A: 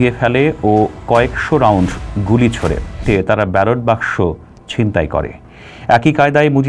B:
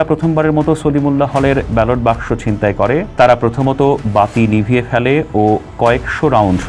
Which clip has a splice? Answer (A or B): A